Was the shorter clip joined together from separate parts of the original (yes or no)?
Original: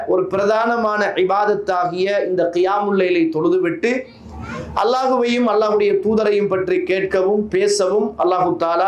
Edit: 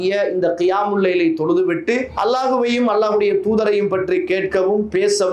yes